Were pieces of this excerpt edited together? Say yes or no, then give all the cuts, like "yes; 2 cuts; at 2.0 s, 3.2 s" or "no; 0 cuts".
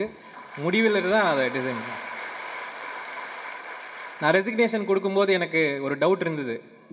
no; 0 cuts